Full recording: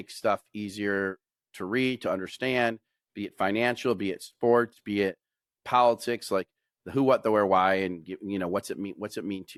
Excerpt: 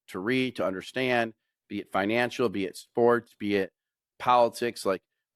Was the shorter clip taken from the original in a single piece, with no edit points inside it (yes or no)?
yes